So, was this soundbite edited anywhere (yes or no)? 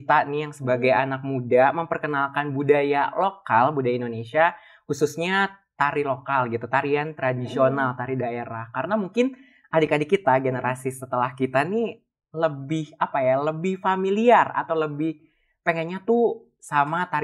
no